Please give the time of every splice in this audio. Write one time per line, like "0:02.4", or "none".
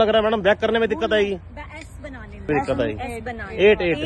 0:02.5